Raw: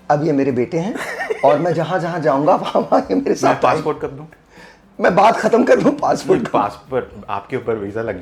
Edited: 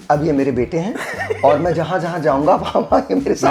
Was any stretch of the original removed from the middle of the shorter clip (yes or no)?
no